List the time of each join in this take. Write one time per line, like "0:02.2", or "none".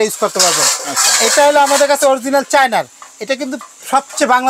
none